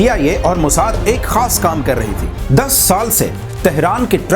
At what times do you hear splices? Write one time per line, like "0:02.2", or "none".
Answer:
0:02.4